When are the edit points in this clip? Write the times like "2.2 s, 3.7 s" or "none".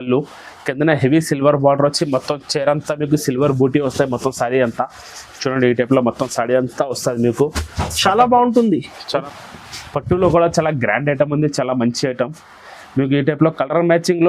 9.2 s

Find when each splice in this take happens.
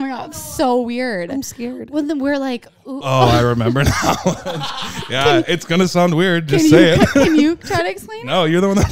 none

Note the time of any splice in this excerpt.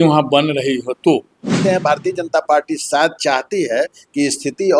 1.6 s

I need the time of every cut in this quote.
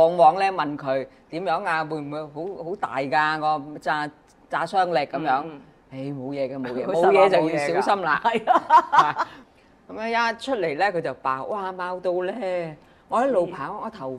9.4 s

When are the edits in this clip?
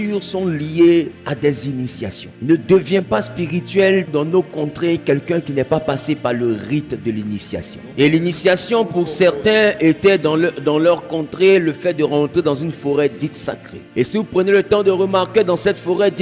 1.2 s, 2.3 s, 4.1 s, 7.8 s, 13.7 s

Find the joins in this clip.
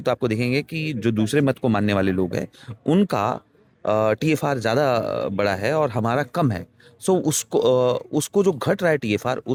none

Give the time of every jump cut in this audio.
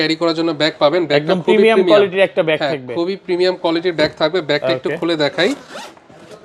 none

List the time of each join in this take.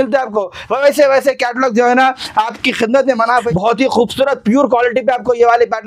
3.4 s

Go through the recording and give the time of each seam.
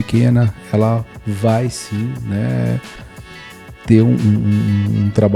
none

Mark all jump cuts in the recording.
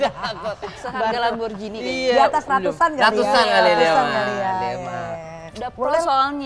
none

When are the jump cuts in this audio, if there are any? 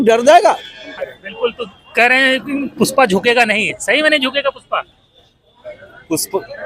0.9 s

